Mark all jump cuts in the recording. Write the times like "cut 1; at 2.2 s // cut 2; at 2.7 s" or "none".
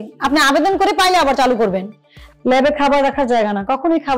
cut 1; at 2.3 s